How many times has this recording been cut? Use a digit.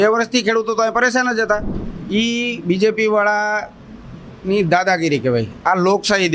1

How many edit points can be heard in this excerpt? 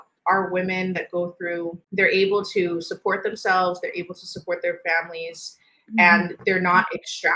1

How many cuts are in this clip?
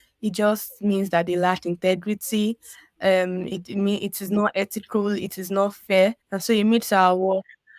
1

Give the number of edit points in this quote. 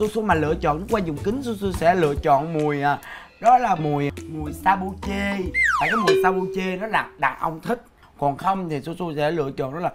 1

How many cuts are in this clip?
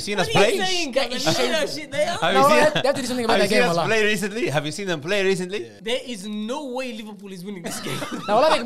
1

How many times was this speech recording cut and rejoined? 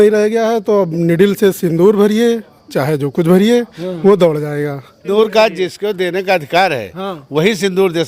1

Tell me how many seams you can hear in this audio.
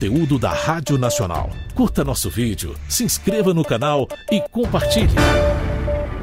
2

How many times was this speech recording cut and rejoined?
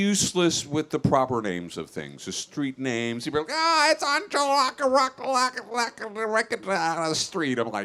0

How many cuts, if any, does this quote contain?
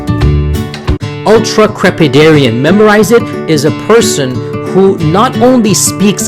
1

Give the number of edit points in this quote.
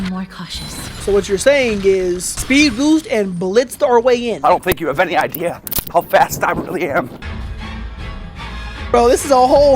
4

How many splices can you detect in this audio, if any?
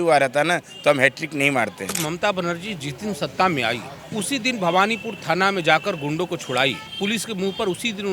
3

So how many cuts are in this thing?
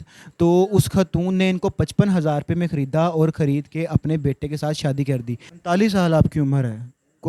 1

